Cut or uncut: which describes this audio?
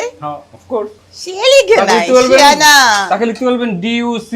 cut